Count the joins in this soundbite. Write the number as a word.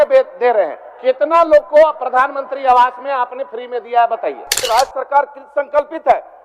one